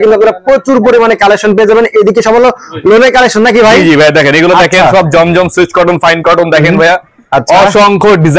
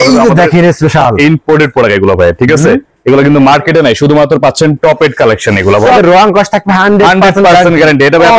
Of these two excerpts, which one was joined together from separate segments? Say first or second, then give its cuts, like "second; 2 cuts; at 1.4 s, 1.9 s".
second; 1 cut; at 6.0 s